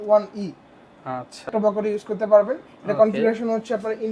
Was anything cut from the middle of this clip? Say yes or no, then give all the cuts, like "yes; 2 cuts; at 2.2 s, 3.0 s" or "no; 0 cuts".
yes; 1 cut; at 1.5 s